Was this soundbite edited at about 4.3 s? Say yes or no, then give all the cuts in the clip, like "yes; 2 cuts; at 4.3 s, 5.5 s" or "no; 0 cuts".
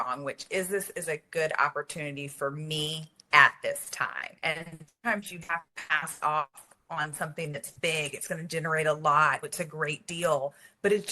yes; 1 cut; at 4.3 s